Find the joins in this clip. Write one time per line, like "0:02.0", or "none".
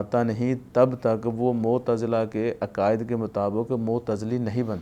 none